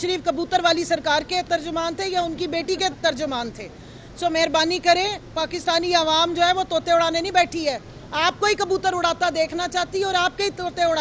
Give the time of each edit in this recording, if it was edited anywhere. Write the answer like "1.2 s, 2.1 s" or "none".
none